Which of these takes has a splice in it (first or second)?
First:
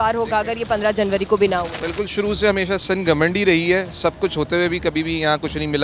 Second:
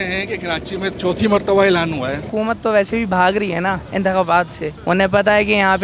second